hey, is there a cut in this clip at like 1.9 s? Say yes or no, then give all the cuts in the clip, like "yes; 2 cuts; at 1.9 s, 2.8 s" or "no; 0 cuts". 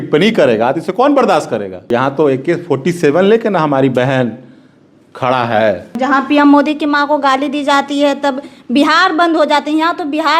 yes; 2 cuts; at 1.9 s, 5.9 s